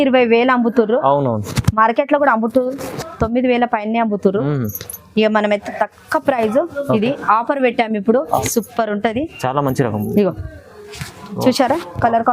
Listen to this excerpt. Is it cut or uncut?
cut